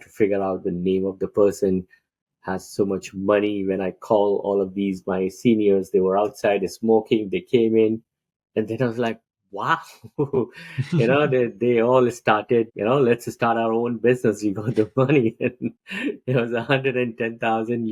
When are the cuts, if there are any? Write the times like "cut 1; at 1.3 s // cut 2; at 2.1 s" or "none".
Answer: none